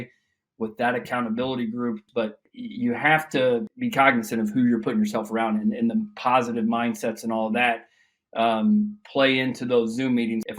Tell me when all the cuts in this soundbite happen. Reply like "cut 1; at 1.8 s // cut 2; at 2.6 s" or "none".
cut 1; at 2.0 s // cut 2; at 3.7 s